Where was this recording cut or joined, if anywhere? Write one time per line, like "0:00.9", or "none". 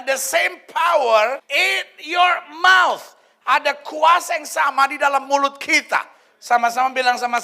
none